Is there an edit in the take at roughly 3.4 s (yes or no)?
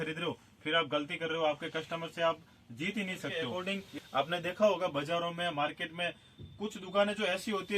yes